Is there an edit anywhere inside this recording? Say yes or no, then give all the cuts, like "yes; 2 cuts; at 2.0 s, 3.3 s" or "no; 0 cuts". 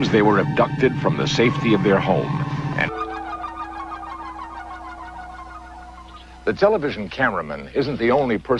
no; 0 cuts